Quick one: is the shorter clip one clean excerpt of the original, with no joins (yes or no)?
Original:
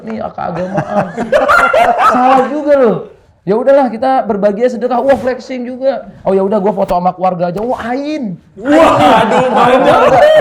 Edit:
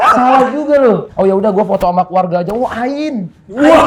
no